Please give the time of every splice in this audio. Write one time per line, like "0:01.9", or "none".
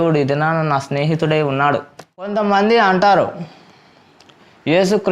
0:02.3